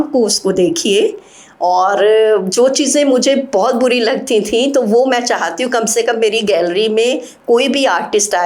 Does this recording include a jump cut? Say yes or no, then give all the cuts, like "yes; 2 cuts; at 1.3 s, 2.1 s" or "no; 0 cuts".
no; 0 cuts